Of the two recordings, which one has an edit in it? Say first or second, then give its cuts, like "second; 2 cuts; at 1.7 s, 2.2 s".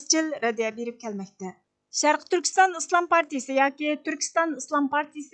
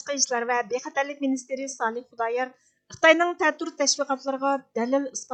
first; 1 cut; at 1.9 s